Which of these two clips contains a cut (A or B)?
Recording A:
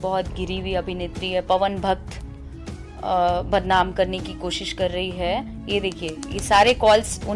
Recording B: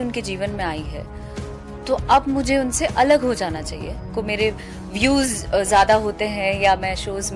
B